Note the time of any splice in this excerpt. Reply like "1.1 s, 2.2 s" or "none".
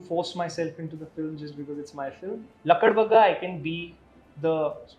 2.3 s